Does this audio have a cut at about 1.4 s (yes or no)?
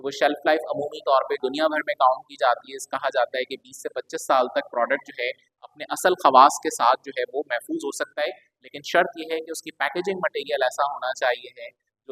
yes